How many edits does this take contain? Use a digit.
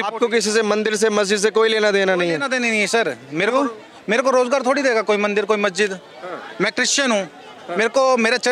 0